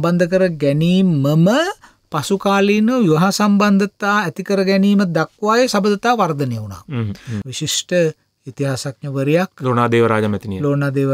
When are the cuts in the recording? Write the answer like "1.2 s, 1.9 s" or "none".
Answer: 7.5 s